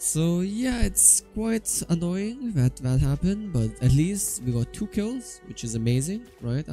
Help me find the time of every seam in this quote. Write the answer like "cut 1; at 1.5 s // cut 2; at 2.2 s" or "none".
none